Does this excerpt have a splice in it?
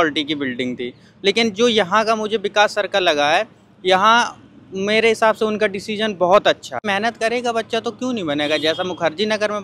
yes; 1 cut; at 6.8 s

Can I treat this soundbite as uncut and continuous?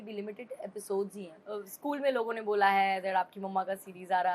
no; 1 cut; at 1.3 s

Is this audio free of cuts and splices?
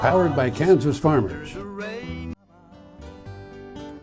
no; 2 cuts; at 1.4 s, 2.3 s

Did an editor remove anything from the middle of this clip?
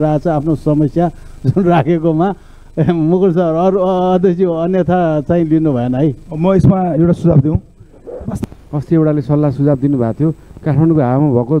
yes; 1 cut; at 8.4 s

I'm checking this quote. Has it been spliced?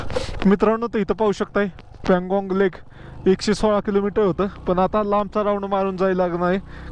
no; 0 cuts

